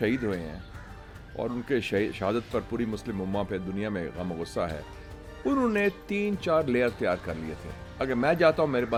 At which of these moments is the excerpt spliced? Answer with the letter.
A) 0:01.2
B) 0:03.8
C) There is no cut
C